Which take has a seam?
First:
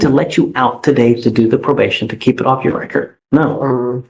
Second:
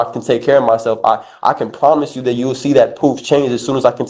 first; 1 cut; at 3.2 s

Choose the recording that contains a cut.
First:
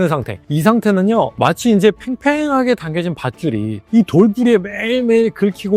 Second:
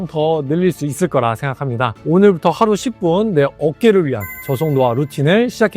second; 1 cut; at 2.0 s

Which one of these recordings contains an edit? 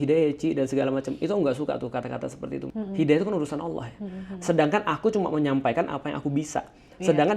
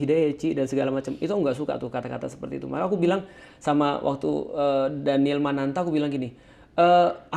first; 1 cut; at 2.7 s

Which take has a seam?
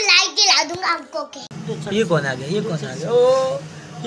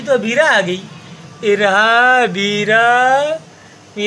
first; 1 cut; at 1.4 s

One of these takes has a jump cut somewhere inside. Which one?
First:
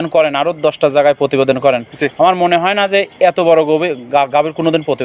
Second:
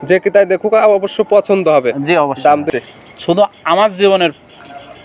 second; 1 cut; at 2.7 s

